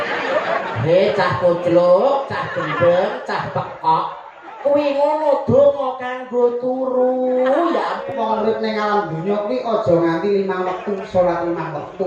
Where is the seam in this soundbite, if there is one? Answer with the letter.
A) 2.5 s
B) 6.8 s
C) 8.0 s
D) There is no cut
C